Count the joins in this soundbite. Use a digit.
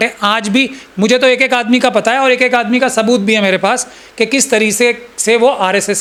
0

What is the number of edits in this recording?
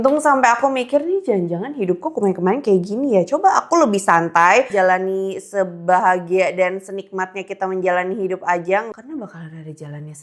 2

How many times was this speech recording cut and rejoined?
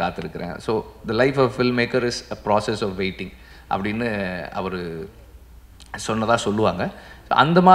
0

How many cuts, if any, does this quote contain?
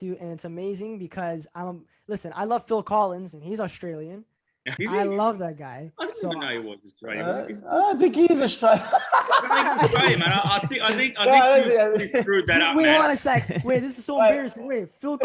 1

